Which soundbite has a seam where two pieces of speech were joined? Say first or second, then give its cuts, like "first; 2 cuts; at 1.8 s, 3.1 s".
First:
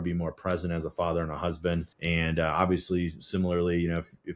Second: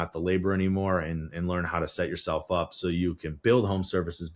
first; 1 cut; at 1.9 s